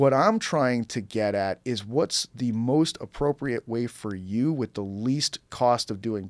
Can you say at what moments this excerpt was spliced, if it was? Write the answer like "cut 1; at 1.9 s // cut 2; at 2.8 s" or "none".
none